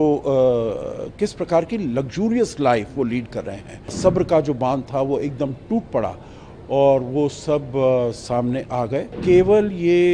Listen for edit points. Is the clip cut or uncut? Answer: cut